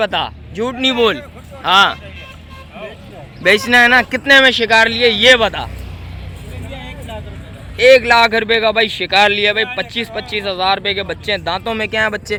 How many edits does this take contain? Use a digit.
0